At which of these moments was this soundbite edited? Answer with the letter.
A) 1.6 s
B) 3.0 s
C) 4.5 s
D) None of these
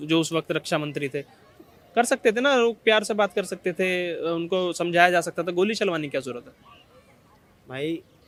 D